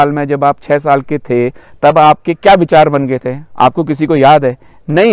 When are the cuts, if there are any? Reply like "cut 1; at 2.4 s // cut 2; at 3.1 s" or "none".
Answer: none